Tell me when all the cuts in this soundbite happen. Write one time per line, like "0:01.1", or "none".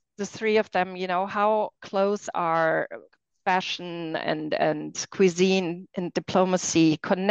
none